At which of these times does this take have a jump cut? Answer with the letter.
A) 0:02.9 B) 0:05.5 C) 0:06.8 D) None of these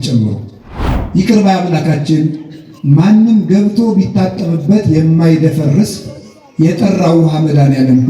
D